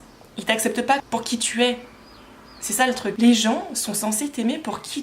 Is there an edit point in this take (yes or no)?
yes